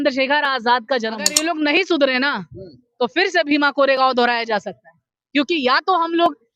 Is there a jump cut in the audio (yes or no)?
yes